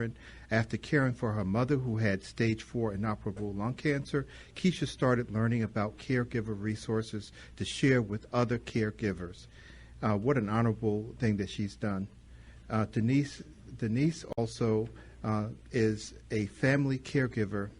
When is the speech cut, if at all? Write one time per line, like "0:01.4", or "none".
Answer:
0:07.7

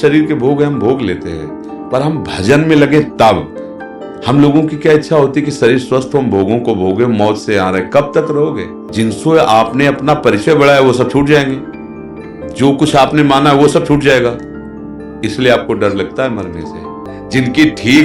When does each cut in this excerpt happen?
0:08.7
0:17.1

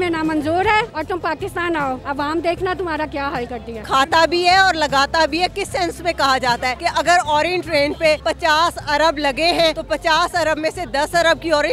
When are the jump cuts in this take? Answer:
0:00.9
0:02.0
0:03.7
0:06.8
0:08.2
0:09.8

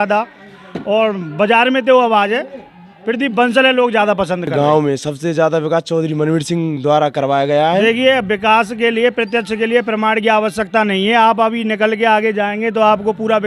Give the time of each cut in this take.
0:04.5
0:07.8

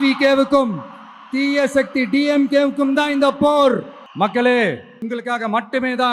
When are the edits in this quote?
0:04.0
0:05.0

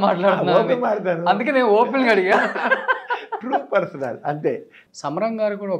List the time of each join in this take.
0:04.8

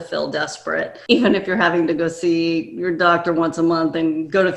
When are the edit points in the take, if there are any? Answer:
0:01.0

